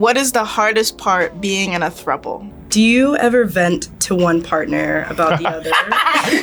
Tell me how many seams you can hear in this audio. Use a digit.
1